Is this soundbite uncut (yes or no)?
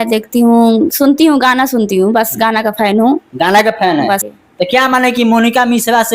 no